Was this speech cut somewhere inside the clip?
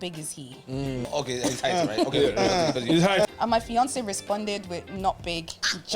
yes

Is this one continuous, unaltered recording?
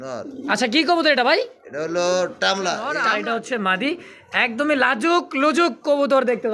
no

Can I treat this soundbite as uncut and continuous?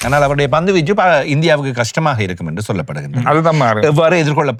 yes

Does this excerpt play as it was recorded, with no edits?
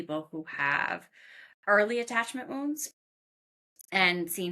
yes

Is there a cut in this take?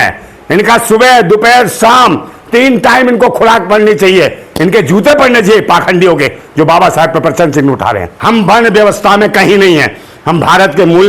yes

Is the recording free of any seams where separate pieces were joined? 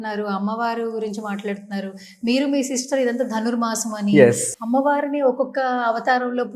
no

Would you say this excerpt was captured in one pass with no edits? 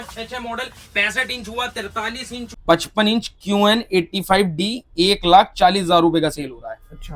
no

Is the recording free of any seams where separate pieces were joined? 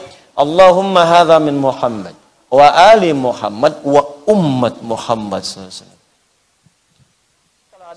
yes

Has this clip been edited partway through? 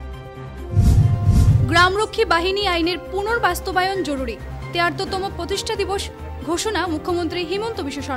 no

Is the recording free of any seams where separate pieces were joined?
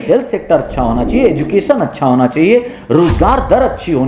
yes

